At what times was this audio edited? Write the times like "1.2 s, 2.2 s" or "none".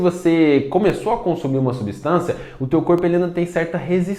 none

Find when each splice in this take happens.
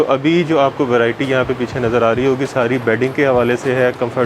none

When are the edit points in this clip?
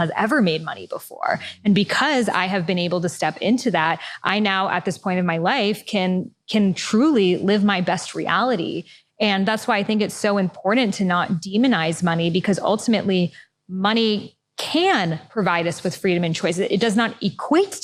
none

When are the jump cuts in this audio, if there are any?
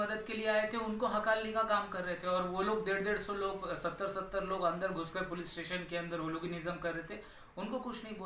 none

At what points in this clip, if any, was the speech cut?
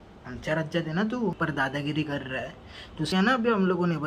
1.4 s, 3.1 s

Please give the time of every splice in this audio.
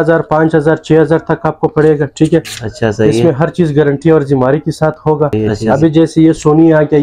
5.3 s

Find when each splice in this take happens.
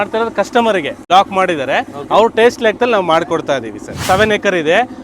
1.0 s, 3.9 s

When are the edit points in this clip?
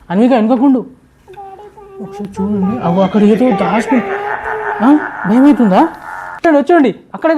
6.4 s

